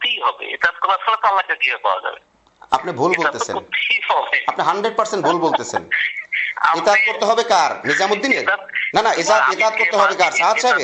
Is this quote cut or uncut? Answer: uncut